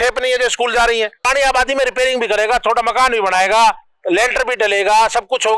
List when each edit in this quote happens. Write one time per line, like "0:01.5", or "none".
0:01.3